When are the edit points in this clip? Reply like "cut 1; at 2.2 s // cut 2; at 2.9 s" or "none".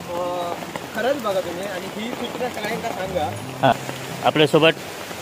cut 1; at 3.7 s

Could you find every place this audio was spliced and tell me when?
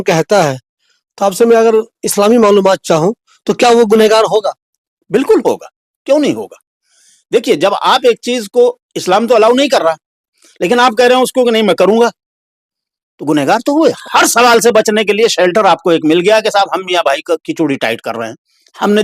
cut 1; at 14.0 s

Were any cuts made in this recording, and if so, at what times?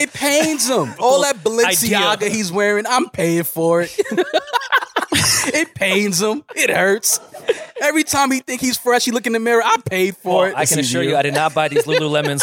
cut 1; at 0.9 s

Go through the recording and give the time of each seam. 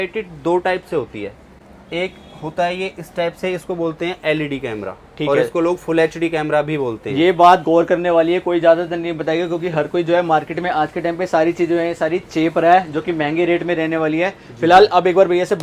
none

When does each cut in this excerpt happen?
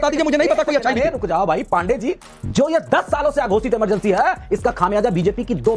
cut 1; at 2.3 s

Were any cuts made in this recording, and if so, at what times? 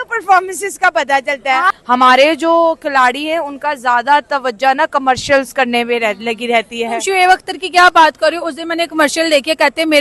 cut 1; at 1.7 s

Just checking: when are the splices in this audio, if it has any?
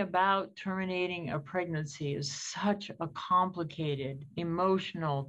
none

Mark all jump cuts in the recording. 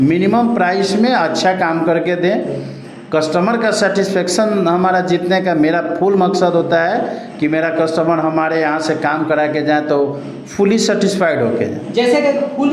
none

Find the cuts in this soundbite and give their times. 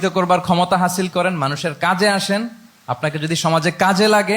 none

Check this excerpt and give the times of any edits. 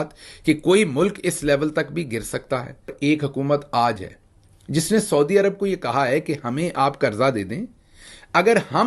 cut 1; at 3.2 s

